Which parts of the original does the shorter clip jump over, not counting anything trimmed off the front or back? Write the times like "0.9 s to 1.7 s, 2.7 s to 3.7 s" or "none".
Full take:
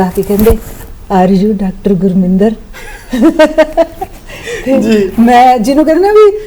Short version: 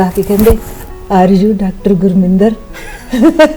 none